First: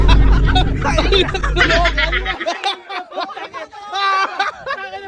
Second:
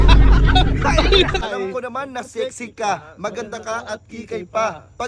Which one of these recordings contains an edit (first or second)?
second